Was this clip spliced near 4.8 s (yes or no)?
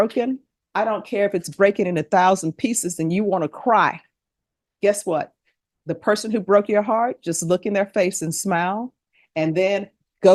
no